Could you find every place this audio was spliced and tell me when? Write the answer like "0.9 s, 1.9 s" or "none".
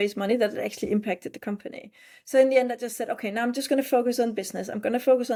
none